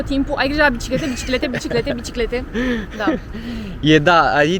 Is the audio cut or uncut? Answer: uncut